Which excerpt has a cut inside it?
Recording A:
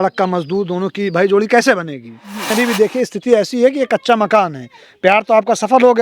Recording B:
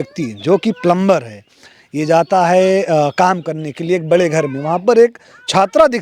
A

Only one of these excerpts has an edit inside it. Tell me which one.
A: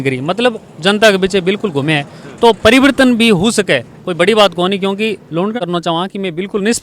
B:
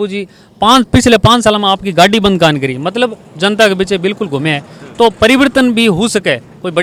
A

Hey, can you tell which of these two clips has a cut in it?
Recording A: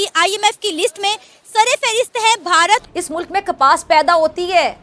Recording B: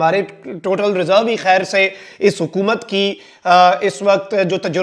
A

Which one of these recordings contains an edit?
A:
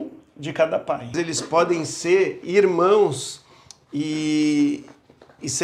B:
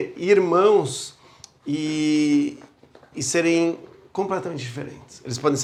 A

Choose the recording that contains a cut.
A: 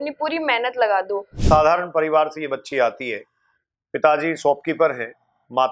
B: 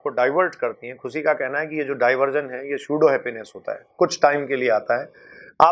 A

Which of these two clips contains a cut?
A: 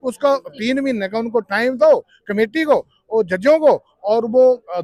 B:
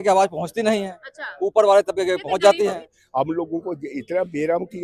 B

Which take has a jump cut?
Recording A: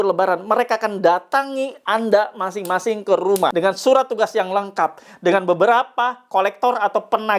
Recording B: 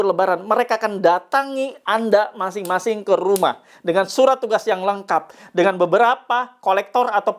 A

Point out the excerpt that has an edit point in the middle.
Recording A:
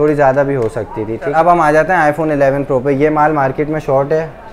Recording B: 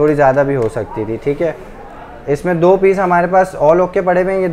A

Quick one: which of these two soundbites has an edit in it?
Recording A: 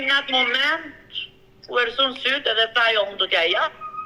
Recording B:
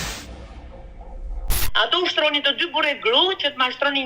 B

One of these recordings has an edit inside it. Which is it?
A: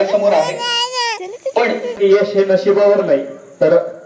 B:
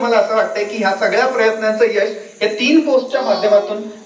A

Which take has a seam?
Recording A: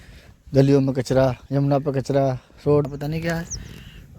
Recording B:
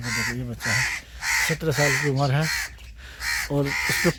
A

